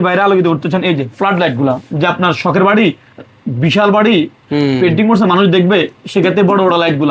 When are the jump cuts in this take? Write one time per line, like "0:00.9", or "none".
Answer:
none